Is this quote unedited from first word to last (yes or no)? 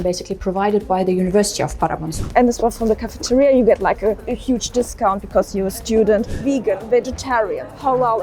no